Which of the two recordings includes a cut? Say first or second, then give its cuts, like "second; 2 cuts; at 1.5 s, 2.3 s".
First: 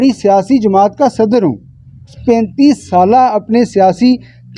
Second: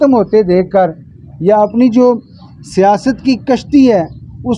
first; 1 cut; at 2.2 s